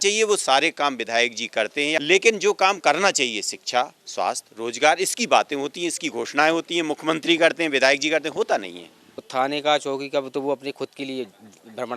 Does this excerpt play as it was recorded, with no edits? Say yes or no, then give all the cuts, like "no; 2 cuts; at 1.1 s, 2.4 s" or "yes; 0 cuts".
no; 2 cuts; at 2.0 s, 9.2 s